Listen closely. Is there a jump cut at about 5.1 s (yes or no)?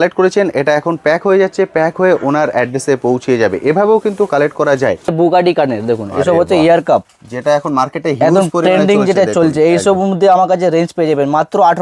yes